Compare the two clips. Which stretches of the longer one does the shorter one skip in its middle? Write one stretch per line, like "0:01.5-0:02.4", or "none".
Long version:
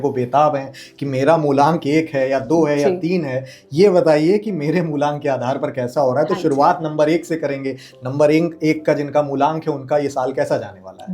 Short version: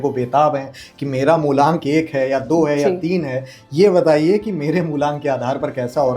none